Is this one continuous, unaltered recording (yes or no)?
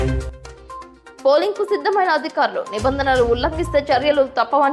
yes